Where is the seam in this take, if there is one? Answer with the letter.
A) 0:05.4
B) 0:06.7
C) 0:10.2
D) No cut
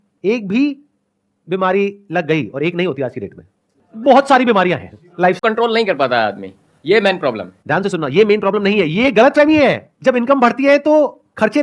A